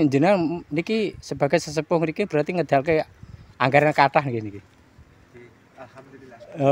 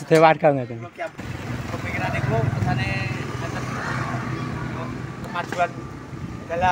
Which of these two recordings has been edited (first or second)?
second